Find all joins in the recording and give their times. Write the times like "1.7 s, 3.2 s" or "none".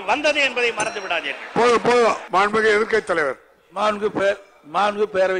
2.2 s